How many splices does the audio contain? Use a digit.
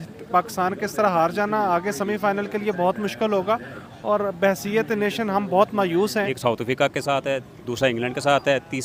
1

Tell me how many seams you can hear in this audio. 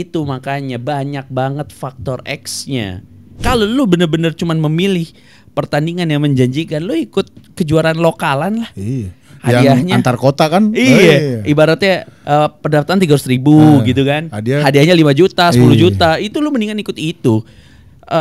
1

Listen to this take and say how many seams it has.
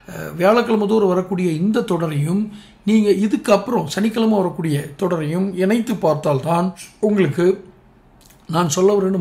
1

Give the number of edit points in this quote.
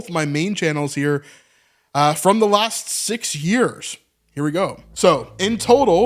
1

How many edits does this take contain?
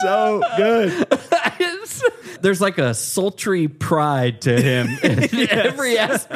1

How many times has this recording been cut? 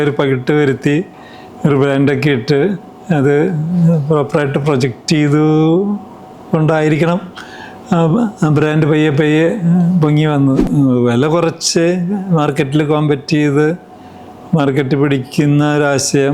1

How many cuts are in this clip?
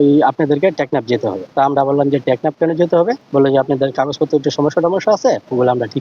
2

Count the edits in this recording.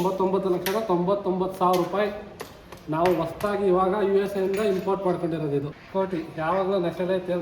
1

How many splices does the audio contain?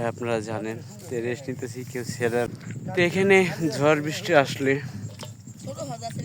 1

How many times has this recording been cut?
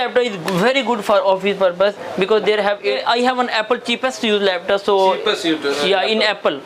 1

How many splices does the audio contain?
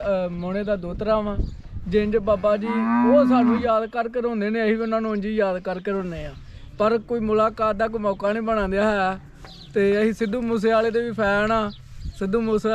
0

